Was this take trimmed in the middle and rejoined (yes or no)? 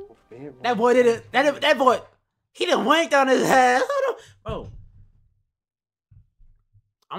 no